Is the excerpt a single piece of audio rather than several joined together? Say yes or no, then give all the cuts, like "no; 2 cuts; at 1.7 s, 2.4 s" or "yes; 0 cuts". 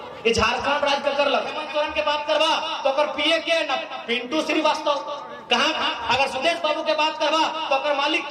no; 1 cut; at 1.6 s